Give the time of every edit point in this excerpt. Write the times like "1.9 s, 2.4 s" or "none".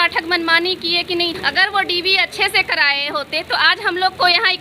1.4 s

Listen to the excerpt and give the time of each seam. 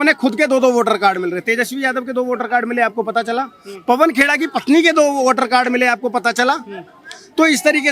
none

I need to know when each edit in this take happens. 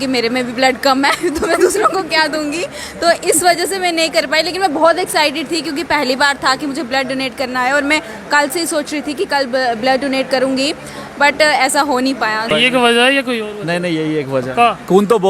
12.5 s

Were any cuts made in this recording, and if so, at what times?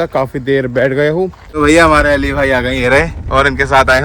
1.4 s

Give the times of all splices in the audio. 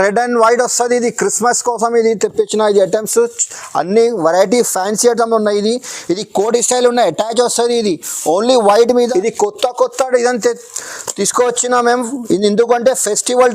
9.1 s

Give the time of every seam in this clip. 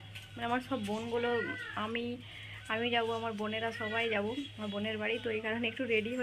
none

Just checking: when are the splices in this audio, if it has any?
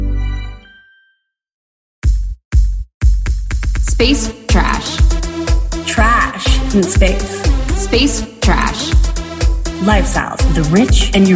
1.7 s

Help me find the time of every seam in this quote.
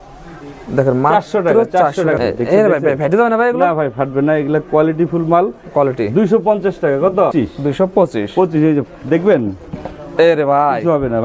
2.2 s, 7.3 s

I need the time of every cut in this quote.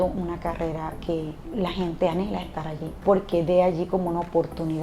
1.4 s, 3.0 s

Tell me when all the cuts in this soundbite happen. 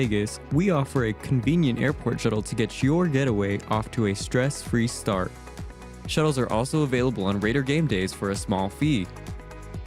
none

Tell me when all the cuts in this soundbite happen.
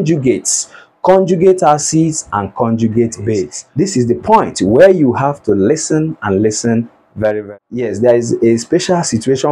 3.6 s, 7.4 s

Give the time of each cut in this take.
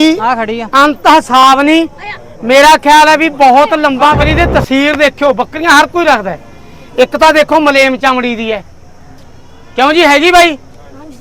4.2 s

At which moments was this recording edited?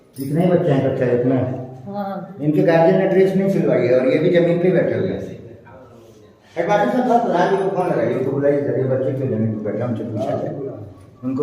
none

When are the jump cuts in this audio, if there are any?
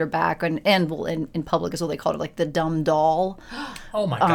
none

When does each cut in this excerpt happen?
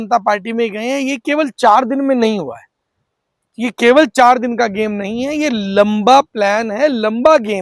none

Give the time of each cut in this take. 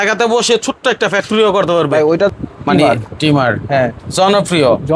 2.4 s

